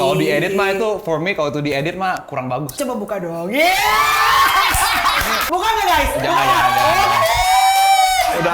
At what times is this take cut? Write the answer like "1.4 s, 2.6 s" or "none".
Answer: 2.7 s, 5.4 s